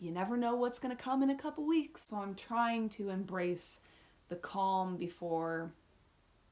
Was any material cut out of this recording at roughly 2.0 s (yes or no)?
yes